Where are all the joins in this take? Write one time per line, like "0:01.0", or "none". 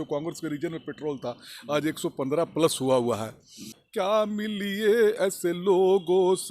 0:03.8